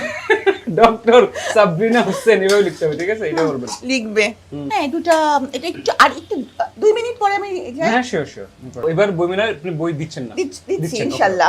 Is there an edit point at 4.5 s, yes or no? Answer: yes